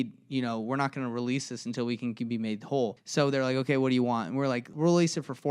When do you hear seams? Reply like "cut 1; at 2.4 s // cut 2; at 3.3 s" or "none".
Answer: cut 1; at 3.0 s // cut 2; at 4.7 s